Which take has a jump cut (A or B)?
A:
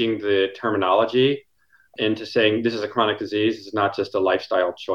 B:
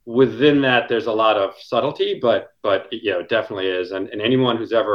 A